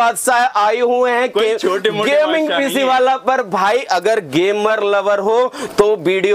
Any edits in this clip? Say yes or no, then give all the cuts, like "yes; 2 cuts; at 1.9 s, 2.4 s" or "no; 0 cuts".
no; 0 cuts